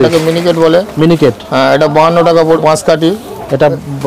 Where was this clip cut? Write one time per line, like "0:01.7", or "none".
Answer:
0:02.6